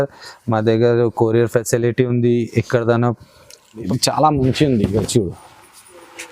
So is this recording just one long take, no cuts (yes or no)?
no